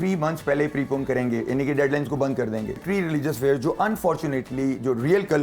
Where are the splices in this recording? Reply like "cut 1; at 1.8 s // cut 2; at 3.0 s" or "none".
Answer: cut 1; at 2.8 s

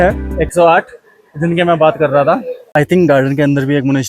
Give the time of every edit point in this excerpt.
cut 1; at 2.6 s

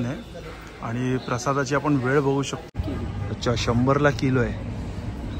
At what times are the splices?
cut 1; at 2.7 s

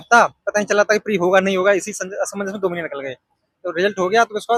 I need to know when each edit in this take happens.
none

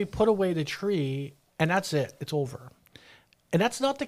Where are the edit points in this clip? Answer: none

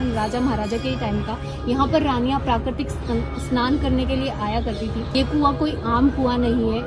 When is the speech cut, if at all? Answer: cut 1; at 5.1 s

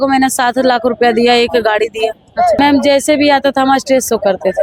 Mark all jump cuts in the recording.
cut 1; at 2.6 s

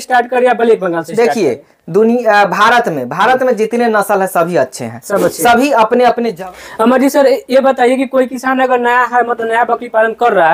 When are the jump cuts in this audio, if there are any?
cut 1; at 6.4 s

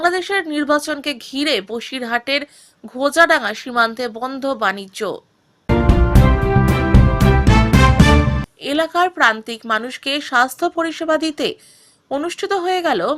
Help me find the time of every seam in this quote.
cut 1; at 5.5 s // cut 2; at 8.4 s

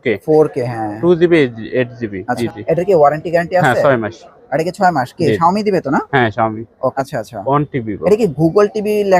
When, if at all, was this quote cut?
cut 1; at 2.4 s // cut 2; at 6.9 s

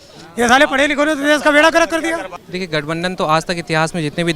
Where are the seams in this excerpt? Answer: cut 1; at 2.3 s

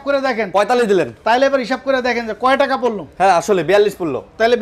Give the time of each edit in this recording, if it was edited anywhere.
none

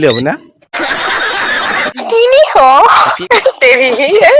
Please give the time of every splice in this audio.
cut 1; at 1.8 s // cut 2; at 3.2 s

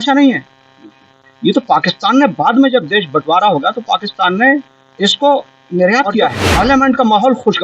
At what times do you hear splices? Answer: cut 1; at 6.4 s

